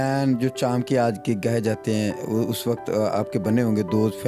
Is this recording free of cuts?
yes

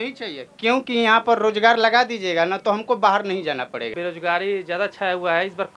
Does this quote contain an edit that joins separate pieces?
yes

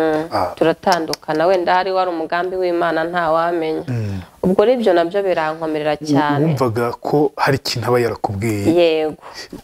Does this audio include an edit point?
no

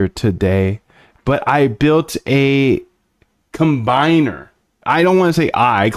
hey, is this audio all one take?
yes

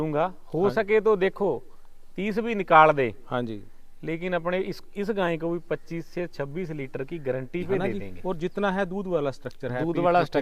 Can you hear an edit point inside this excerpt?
yes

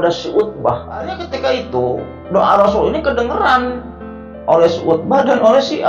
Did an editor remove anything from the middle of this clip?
yes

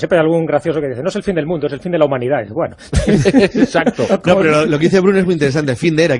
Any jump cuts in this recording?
yes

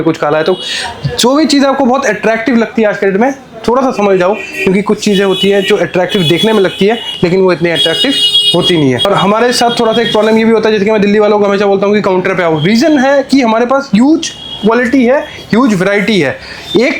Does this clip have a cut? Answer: no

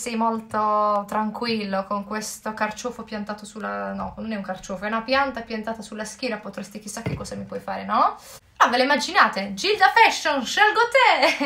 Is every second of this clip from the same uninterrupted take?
no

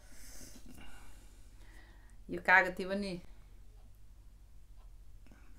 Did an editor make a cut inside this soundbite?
no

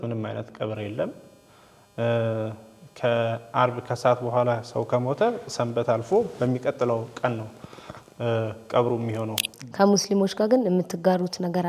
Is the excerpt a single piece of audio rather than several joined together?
no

